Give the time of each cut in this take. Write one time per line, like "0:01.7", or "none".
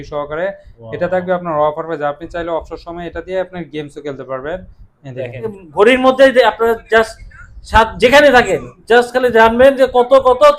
0:05.5

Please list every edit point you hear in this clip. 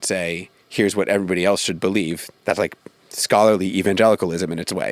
0:02.3

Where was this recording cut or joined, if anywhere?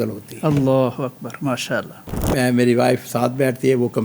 0:02.0

